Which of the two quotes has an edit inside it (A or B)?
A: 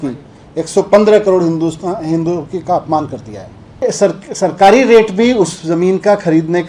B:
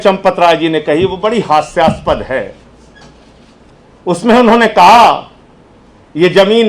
A